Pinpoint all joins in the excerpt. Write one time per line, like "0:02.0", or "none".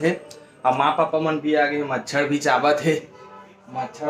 none